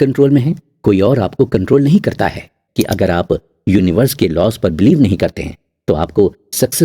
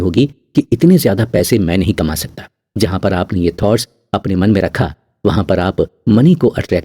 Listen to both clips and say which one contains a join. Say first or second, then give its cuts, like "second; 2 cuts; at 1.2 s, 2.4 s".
first; 1 cut; at 2.6 s